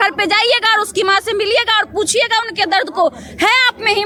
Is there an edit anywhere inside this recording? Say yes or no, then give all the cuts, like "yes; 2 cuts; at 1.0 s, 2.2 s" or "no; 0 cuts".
no; 0 cuts